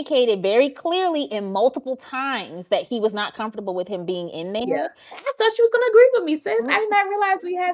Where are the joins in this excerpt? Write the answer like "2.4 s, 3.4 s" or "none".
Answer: 5.1 s

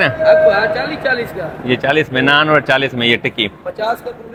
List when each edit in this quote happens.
none

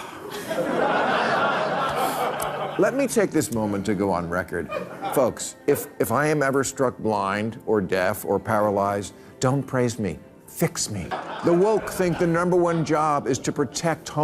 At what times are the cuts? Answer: 11.1 s

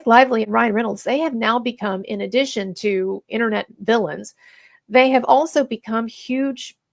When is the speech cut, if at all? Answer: none

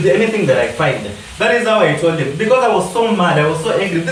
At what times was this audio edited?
none

